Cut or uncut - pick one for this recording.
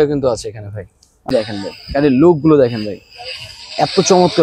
cut